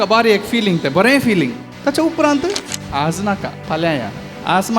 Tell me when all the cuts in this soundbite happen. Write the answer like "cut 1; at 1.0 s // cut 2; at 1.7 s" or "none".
cut 1; at 1.7 s // cut 2; at 2.7 s // cut 3; at 3.5 s